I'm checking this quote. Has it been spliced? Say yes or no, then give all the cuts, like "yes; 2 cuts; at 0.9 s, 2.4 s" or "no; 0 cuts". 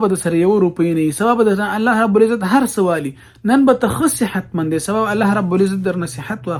no; 0 cuts